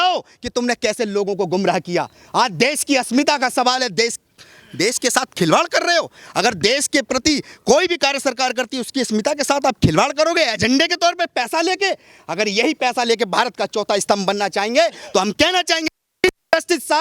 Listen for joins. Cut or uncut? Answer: uncut